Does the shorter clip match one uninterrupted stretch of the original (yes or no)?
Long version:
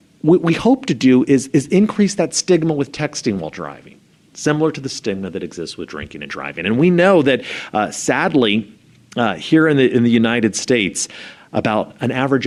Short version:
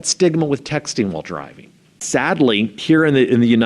no